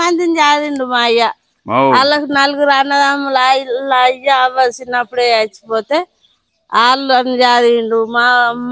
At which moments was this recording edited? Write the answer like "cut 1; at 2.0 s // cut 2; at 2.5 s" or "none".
none